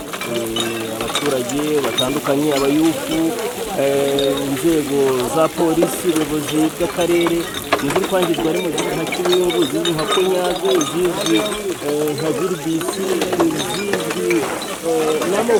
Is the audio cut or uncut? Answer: uncut